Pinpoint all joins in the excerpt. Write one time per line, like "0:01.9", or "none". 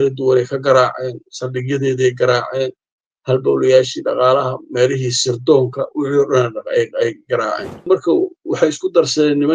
0:07.9